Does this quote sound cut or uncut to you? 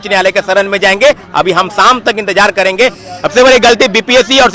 cut